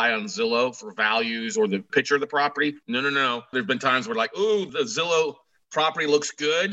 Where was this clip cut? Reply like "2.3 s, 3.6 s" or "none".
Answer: 1.9 s, 3.1 s